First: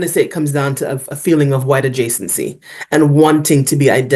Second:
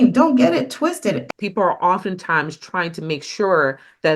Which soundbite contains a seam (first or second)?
second